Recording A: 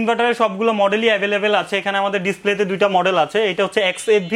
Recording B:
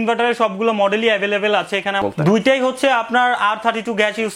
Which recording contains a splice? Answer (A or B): B